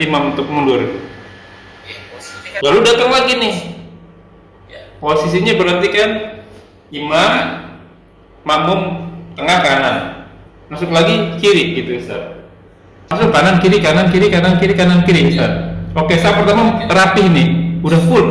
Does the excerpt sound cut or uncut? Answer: cut